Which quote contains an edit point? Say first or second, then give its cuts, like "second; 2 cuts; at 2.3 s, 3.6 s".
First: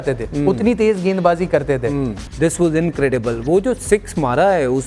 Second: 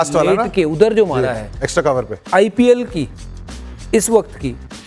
first; 1 cut; at 2.2 s